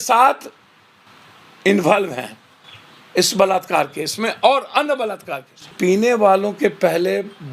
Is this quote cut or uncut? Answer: cut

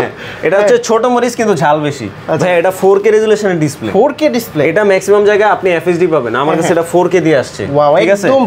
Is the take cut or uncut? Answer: uncut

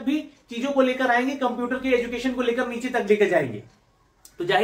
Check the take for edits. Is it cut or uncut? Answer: uncut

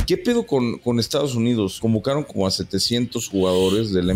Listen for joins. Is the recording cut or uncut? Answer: cut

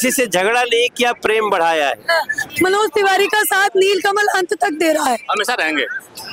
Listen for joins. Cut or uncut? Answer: cut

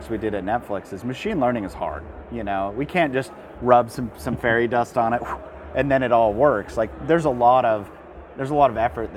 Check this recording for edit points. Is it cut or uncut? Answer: uncut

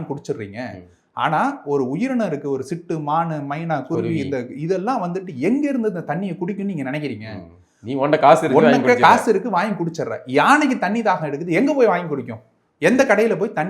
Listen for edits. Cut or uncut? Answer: uncut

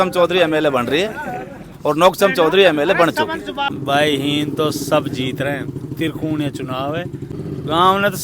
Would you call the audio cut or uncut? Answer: cut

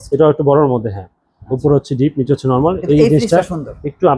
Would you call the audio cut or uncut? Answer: uncut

